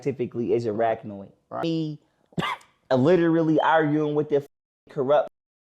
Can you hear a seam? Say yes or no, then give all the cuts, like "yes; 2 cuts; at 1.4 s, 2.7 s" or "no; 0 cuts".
yes; 1 cut; at 1.6 s